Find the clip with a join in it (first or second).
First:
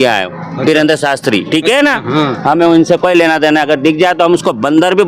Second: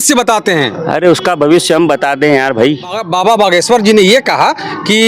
second